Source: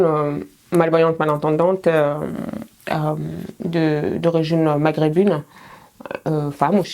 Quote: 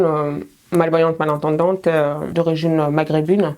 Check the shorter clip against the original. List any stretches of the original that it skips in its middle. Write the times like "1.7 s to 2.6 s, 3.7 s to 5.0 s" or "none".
2.3 s to 4.2 s